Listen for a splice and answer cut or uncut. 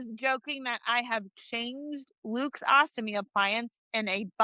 uncut